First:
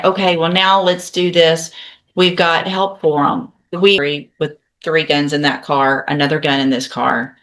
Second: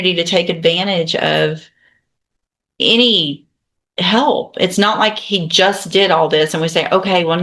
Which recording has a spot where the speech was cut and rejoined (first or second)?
first